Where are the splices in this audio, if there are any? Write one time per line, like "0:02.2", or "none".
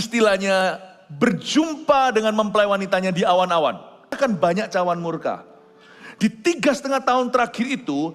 0:04.2